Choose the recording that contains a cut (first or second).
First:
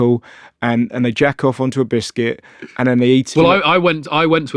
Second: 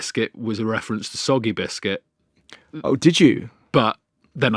first